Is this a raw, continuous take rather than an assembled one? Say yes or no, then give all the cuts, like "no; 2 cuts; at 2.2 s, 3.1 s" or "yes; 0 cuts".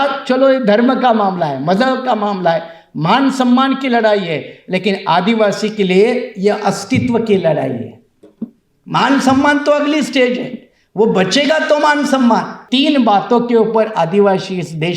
no; 1 cut; at 12.6 s